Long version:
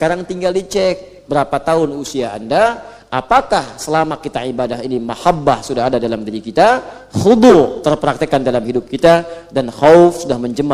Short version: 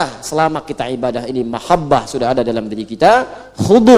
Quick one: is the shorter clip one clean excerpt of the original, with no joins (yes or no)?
yes